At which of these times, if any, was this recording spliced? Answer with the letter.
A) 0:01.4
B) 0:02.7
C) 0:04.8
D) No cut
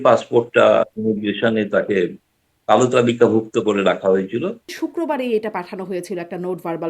C